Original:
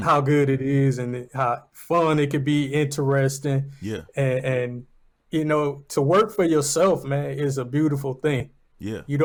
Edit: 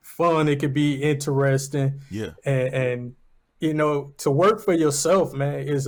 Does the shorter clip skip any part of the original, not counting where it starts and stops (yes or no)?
no